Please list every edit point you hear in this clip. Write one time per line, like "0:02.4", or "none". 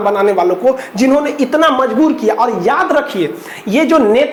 none